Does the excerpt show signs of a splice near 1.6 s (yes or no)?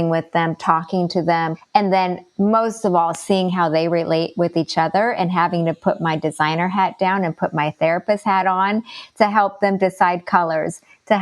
yes